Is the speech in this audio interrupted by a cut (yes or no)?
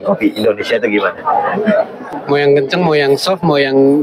yes